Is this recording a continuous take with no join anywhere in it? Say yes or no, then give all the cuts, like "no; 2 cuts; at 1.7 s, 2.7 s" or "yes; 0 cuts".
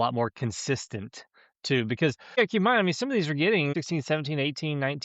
no; 2 cuts; at 2.4 s, 3.7 s